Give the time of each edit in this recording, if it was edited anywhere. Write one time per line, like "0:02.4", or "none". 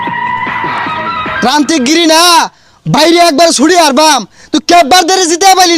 0:01.4